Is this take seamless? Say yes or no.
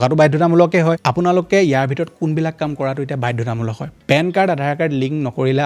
no